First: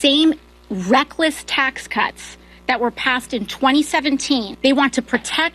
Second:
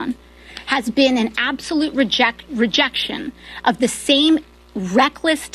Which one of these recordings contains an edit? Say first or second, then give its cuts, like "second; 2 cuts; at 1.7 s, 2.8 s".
first; 1 cut; at 4.5 s